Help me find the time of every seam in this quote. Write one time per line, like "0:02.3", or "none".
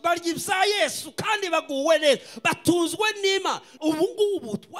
0:03.7